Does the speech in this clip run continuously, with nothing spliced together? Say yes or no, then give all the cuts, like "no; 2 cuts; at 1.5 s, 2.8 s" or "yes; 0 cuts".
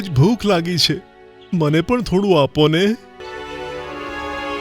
no; 1 cut; at 3.2 s